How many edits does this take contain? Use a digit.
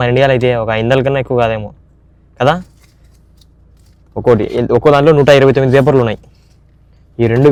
0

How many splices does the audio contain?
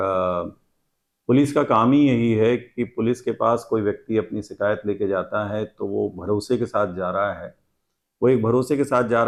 0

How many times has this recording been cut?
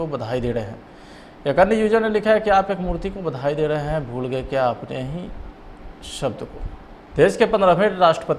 1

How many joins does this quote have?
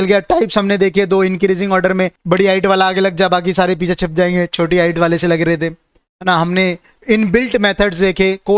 1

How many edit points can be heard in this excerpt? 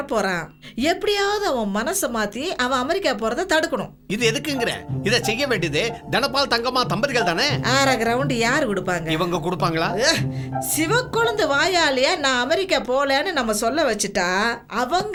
0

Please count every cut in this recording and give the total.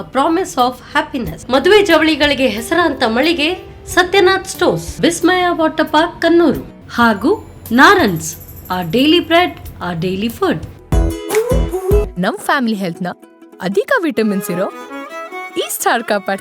1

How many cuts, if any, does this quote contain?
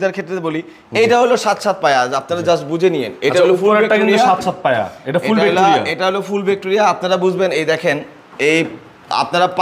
0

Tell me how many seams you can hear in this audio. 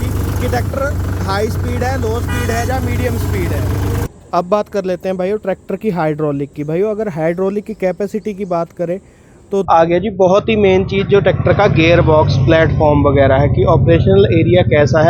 2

